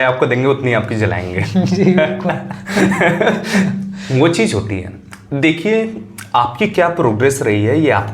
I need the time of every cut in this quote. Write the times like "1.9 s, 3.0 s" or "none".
none